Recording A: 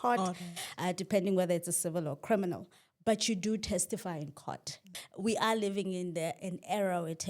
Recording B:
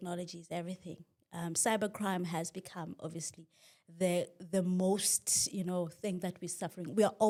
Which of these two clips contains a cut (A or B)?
A